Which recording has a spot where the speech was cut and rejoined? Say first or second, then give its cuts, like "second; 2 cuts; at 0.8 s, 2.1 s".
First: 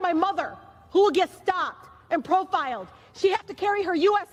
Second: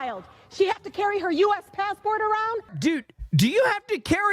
second; 1 cut; at 2.7 s